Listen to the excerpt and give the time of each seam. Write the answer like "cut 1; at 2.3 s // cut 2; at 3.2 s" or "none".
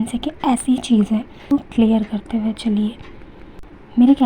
cut 1; at 1.3 s